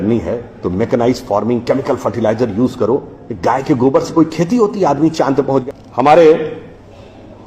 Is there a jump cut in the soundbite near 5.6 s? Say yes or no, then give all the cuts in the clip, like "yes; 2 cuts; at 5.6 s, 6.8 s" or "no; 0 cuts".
yes; 1 cut; at 5.6 s